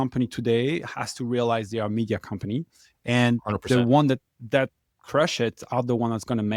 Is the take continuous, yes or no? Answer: yes